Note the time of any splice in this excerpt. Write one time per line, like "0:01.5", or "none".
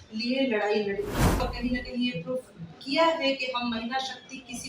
0:01.5